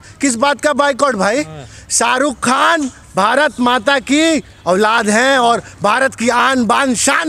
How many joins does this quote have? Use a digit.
0